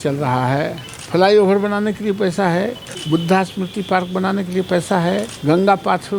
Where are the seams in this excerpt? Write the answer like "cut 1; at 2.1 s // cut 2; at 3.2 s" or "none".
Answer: cut 1; at 0.9 s // cut 2; at 2.9 s // cut 3; at 5.3 s